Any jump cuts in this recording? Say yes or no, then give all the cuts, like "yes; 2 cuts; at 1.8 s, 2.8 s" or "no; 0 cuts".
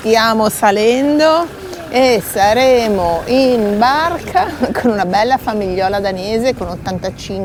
no; 0 cuts